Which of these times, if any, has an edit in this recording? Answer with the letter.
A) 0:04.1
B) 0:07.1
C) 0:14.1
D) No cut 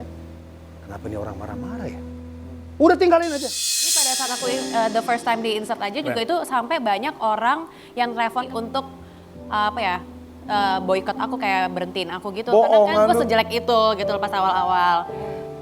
A